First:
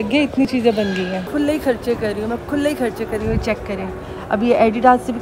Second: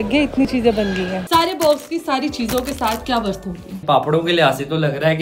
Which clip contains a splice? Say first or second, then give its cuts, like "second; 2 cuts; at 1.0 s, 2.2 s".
second; 2 cuts; at 1.2 s, 3.8 s